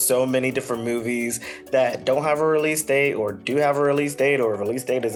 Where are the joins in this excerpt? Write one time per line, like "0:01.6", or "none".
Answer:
none